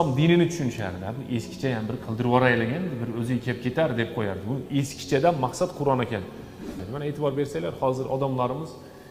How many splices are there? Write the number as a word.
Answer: one